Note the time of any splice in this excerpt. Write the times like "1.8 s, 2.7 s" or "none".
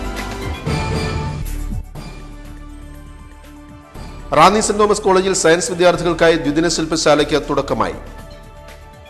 none

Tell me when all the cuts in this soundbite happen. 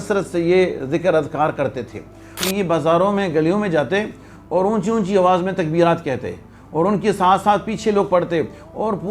2.4 s

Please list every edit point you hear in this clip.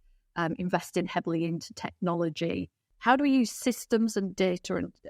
2.8 s

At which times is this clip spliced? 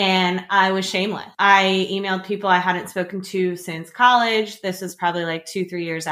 1.2 s

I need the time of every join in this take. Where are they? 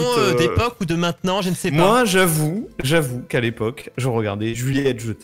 none

